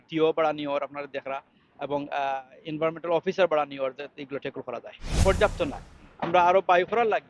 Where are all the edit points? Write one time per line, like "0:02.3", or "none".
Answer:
0:05.2

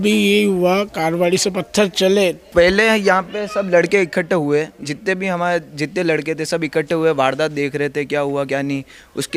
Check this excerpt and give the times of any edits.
0:02.4

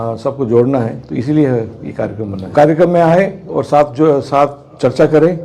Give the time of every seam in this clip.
0:02.5

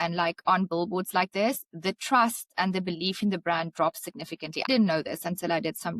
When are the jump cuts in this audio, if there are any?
0:04.7

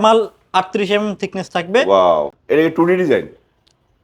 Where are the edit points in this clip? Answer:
0:02.3

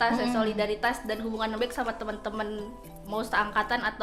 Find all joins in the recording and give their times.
none

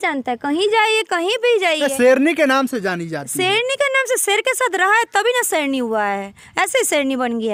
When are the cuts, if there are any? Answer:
none

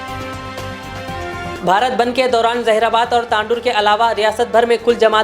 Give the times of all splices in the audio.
none

